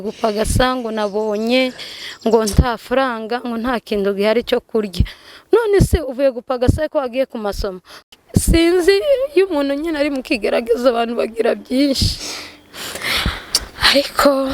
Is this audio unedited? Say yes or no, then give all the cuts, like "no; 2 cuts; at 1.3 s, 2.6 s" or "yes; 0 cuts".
no; 1 cut; at 7.9 s